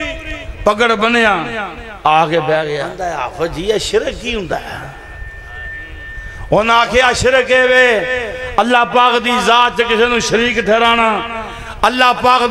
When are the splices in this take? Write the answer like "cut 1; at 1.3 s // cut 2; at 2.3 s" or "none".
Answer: cut 1; at 2.9 s